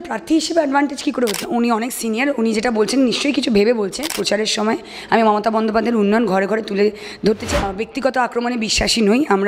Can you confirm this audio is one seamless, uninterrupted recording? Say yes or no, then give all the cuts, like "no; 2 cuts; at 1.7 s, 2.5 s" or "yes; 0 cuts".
no; 3 cuts; at 1.5 s, 4.2 s, 7.7 s